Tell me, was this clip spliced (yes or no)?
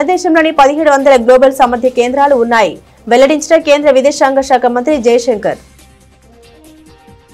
yes